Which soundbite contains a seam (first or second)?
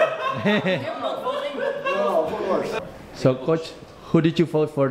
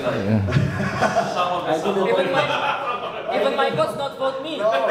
first